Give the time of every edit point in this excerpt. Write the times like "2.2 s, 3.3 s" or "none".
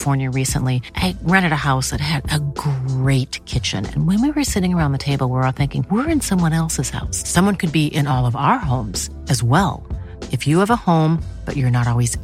none

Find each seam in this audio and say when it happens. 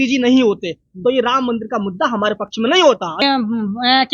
3.2 s

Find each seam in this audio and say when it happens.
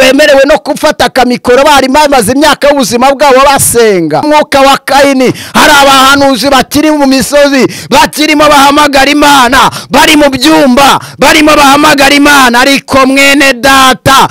4.2 s

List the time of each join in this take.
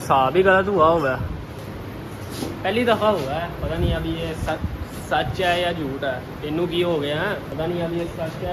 1.6 s, 7.5 s

